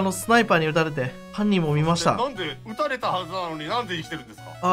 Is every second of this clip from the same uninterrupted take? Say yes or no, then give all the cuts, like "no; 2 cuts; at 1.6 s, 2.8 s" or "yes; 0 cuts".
no; 2 cuts; at 1.2 s, 2.6 s